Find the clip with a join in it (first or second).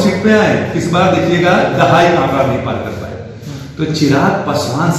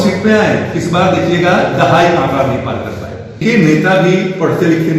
second